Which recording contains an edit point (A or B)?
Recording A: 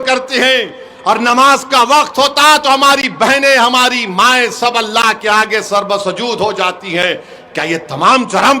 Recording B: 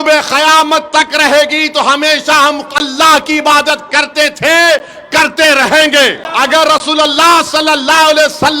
B